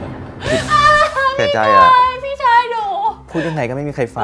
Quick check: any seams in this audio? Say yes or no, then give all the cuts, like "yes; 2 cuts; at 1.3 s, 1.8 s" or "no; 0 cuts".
no; 0 cuts